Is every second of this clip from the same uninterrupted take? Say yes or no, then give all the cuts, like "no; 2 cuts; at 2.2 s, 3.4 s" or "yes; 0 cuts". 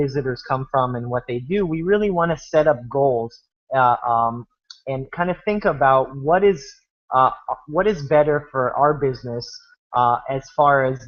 yes; 0 cuts